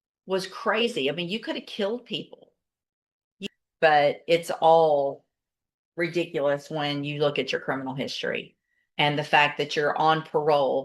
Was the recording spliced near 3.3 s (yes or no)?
yes